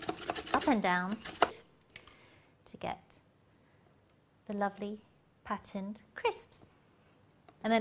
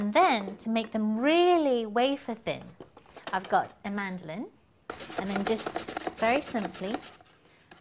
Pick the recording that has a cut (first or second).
first